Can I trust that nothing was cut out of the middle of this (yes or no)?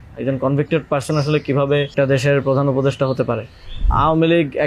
no